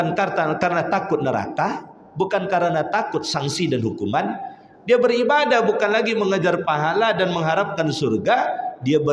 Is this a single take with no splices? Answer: yes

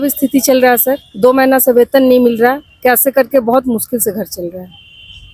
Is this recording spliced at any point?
no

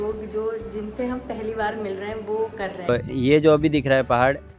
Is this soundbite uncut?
no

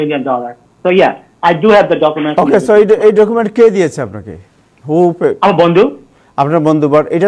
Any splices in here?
no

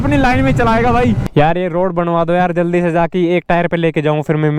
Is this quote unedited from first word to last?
no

